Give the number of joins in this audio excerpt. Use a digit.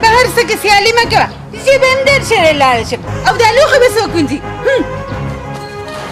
0